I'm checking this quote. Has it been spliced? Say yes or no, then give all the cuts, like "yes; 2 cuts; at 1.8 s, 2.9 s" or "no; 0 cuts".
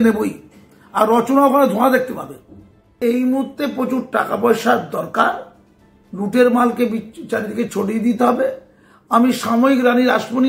yes; 1 cut; at 2.9 s